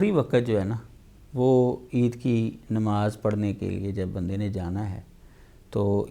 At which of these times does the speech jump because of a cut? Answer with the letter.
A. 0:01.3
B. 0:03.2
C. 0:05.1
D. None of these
D